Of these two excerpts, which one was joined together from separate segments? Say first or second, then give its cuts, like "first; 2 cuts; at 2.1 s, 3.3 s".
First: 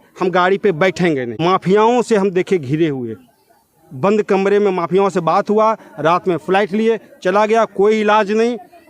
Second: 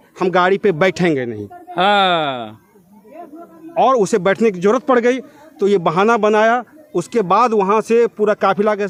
first; 1 cut; at 1.3 s